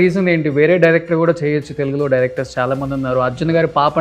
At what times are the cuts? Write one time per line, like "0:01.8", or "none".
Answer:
none